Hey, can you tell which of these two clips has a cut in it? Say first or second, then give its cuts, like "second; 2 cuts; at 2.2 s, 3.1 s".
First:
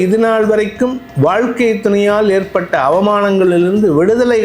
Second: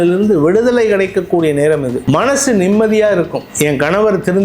second; 2 cuts; at 1.9 s, 3.4 s